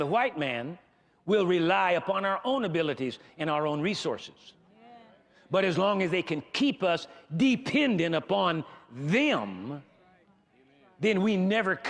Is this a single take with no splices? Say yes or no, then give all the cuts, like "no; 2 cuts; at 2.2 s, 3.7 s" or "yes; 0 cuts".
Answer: yes; 0 cuts